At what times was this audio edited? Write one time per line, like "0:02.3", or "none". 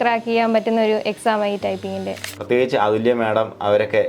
0:02.3

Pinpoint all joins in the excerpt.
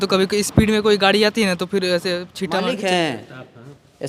0:02.6

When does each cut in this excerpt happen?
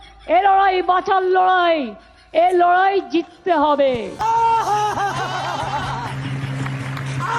0:04.1

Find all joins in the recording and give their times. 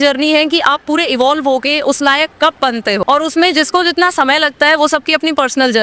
0:03.0

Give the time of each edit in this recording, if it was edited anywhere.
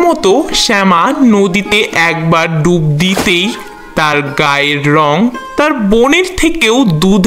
none

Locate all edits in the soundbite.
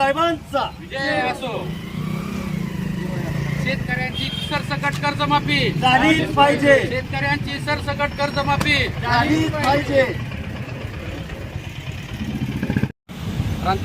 0:12.9

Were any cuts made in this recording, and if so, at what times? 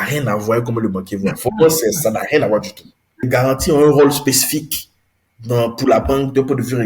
0:03.3

